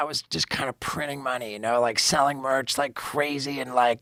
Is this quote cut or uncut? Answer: uncut